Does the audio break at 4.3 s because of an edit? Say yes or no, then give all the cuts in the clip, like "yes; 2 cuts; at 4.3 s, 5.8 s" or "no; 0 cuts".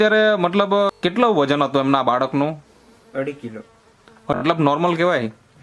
yes; 2 cuts; at 1.0 s, 4.3 s